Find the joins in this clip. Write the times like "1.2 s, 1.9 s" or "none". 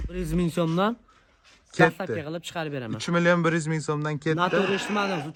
none